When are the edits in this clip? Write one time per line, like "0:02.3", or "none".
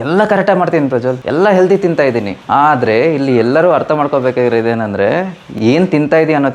none

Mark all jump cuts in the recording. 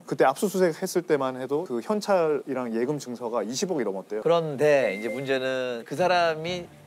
0:04.1

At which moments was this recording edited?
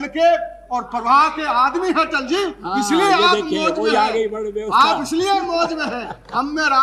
none

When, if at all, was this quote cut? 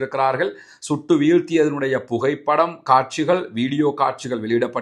none

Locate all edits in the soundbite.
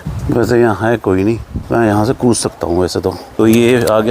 0:01.5
0:03.3

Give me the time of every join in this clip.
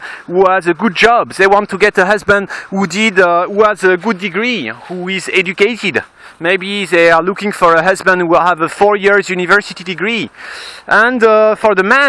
none

